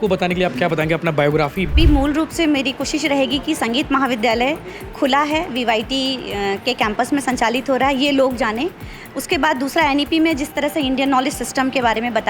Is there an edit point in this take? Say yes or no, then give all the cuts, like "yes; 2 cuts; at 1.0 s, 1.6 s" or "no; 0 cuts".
yes; 1 cut; at 1.7 s